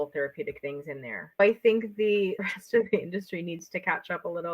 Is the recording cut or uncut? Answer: cut